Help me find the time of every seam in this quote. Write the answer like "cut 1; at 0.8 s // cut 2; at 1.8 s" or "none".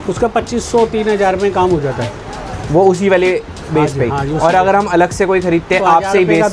none